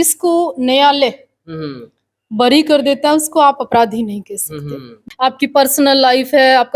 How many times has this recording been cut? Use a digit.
1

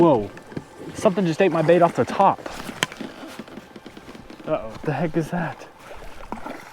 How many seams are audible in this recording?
1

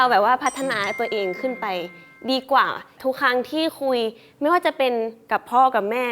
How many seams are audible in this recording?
1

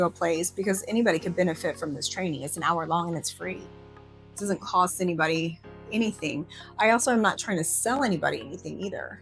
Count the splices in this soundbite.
0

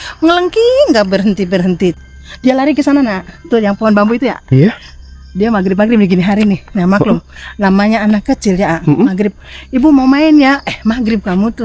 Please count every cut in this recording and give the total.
1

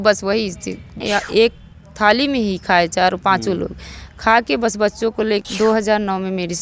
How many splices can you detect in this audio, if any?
2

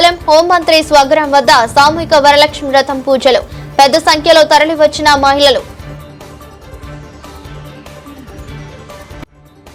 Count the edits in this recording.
0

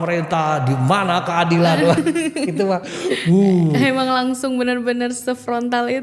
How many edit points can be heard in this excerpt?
0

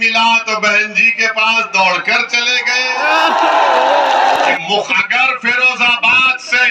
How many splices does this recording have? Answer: 1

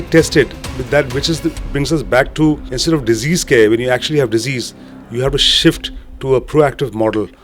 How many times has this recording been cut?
1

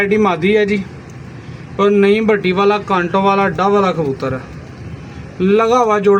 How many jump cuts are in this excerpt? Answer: 0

